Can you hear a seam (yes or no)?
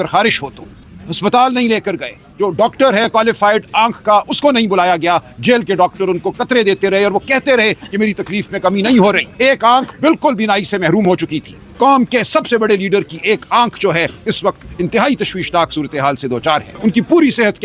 yes